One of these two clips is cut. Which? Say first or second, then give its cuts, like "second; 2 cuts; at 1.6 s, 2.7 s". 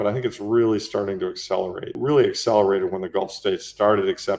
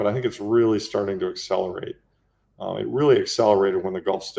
first; 1 cut; at 2.0 s